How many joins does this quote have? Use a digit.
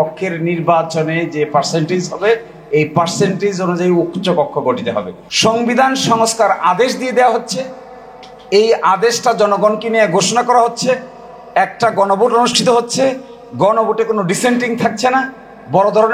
1